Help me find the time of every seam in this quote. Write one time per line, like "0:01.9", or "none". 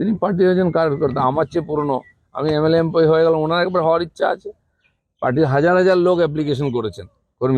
none